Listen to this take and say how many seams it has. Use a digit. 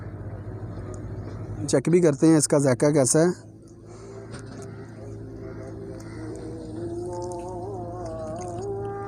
1